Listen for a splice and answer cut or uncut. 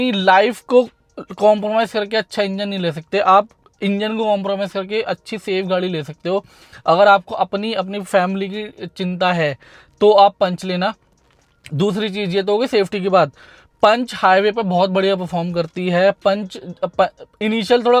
uncut